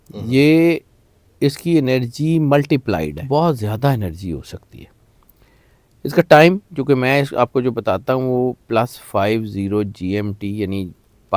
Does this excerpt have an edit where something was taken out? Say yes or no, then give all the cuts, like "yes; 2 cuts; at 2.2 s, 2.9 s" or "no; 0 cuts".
yes; 1 cut; at 3.2 s